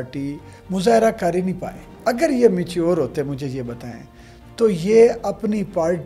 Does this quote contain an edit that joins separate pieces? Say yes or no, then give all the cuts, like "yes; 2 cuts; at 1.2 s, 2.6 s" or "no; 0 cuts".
yes; 1 cut; at 1.9 s